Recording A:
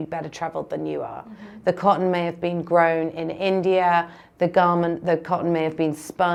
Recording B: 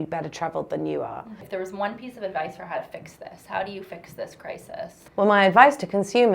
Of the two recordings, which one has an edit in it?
B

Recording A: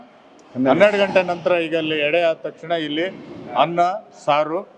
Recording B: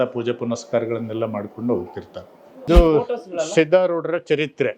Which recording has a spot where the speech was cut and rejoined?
B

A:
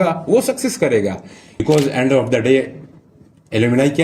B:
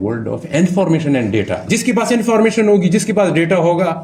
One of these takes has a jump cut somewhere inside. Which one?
A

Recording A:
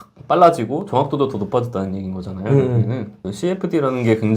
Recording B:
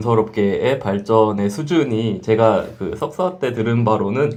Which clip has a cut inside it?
A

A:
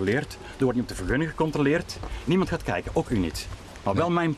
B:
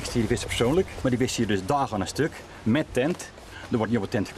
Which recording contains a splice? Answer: B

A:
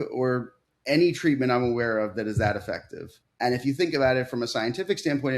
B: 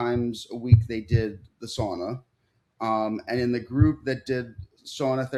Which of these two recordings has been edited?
A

